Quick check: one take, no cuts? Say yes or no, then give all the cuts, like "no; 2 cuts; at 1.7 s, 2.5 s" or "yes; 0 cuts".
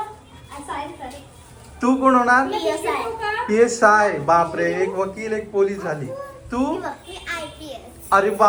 yes; 0 cuts